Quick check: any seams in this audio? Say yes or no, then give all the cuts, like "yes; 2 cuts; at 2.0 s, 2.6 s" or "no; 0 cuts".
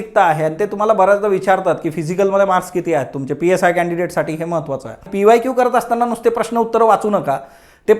yes; 1 cut; at 5.1 s